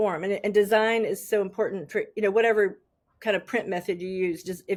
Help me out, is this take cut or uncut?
uncut